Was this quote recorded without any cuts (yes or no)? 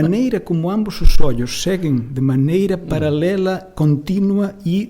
yes